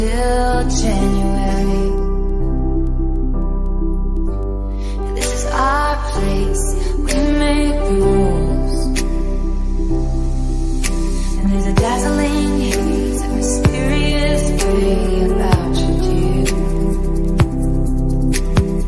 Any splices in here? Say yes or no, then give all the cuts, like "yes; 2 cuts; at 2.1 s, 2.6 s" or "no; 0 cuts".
no; 0 cuts